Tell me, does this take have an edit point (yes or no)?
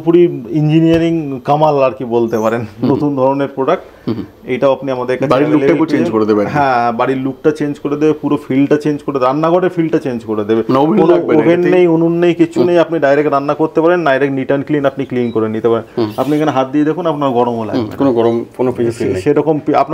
no